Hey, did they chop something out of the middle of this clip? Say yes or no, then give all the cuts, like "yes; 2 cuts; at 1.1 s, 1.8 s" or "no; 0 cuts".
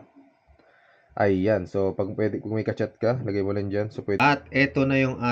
yes; 1 cut; at 4.2 s